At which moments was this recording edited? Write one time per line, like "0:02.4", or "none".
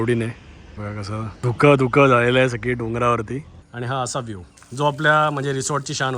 0:03.5